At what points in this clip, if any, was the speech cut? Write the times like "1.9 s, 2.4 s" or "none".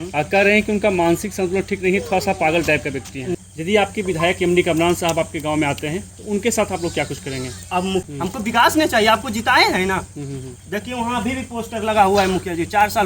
3.3 s, 8.1 s

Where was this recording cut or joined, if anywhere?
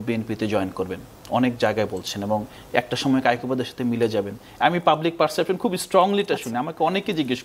none

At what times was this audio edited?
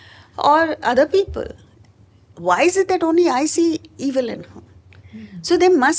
none

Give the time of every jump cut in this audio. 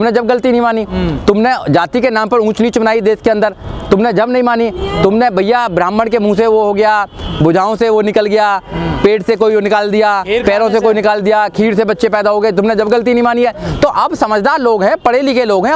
none

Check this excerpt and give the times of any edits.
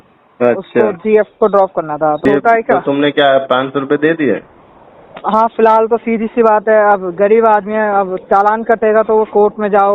2.2 s

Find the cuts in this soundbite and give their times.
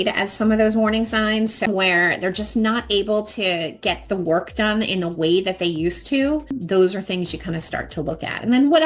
1.7 s, 6.6 s

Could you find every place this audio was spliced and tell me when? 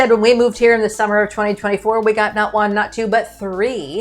none

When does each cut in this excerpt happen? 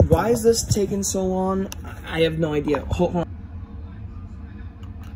3.3 s

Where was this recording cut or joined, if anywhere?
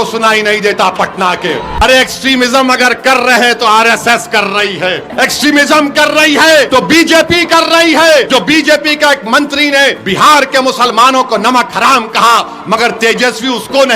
1.7 s, 5.1 s, 6.7 s, 8.3 s, 10.0 s

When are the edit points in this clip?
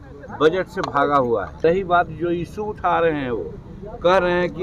1.6 s

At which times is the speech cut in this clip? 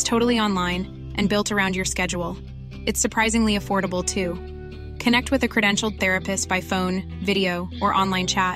none

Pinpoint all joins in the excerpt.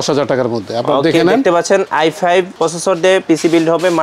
2.2 s

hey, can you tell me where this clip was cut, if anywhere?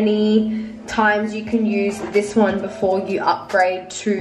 none

